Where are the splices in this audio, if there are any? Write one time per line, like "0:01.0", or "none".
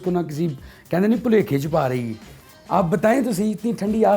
none